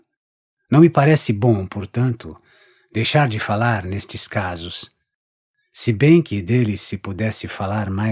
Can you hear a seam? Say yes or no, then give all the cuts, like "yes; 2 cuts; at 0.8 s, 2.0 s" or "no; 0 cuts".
yes; 1 cut; at 6.6 s